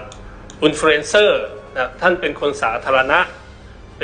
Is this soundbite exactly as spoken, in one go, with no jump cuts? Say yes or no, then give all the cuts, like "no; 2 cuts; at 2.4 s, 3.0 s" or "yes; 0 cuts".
yes; 0 cuts